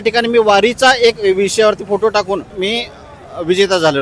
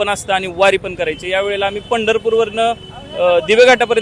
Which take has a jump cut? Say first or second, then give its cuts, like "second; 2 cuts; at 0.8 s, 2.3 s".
first; 1 cut; at 2.5 s